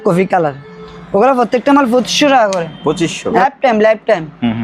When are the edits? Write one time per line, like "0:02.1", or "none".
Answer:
0:03.4